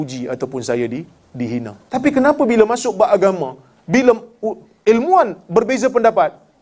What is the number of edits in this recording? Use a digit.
1